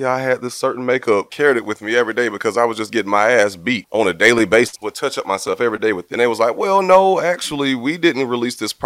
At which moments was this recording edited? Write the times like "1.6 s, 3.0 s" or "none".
1.3 s, 3.8 s, 4.8 s, 6.1 s